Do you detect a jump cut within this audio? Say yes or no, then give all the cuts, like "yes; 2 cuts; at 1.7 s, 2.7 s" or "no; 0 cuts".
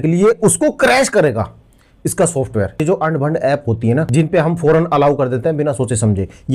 no; 0 cuts